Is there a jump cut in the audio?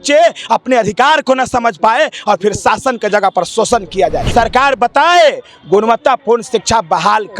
yes; 1 cut; at 4.3 s

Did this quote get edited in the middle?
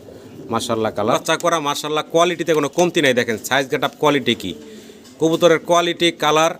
yes; 1 cut; at 1.2 s

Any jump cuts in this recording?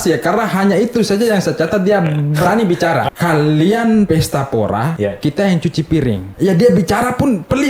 yes; 4 cuts; at 3.0 s, 4.1 s, 4.9 s, 6.3 s

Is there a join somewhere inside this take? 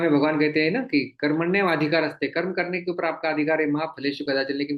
no; 0 cuts

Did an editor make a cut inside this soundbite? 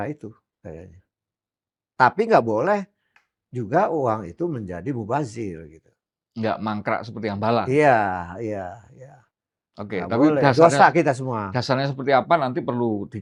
no; 0 cuts

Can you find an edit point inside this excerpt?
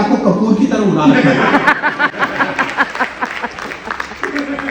no; 0 cuts

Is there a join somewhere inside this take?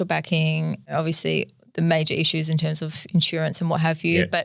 yes; 1 cut; at 0.9 s

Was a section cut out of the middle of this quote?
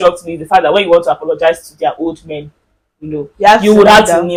no; 0 cuts

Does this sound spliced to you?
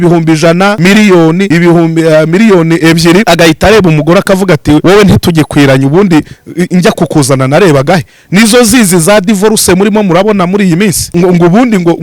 yes; 5 cuts; at 0.8 s, 1.5 s, 3.2 s, 4.8 s, 11.0 s

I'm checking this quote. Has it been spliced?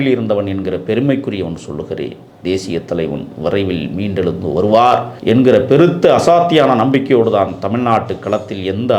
yes; 1 cut; at 5.1 s

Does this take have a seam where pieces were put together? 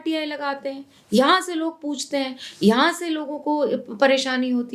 no; 0 cuts

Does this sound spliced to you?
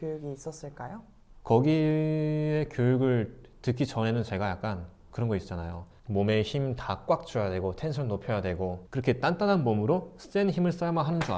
yes; 2 cuts; at 1.3 s, 8.8 s

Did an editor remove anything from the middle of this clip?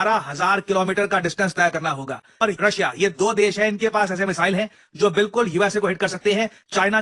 yes; 1 cut; at 2.4 s

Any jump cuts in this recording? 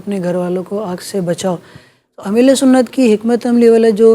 no; 0 cuts

